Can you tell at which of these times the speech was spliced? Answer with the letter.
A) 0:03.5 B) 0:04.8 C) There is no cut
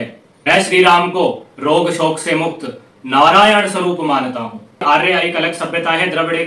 B